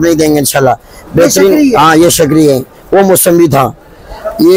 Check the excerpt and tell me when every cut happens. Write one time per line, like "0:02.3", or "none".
none